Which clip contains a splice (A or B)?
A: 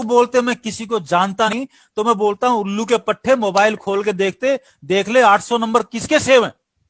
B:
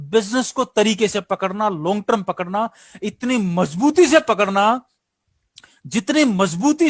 A